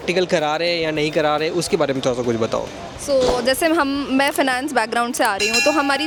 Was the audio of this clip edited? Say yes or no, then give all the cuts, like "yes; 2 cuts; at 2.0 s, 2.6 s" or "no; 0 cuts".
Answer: no; 0 cuts